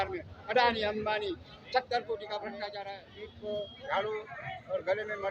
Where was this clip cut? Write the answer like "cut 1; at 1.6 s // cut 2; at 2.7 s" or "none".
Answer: cut 1; at 2.7 s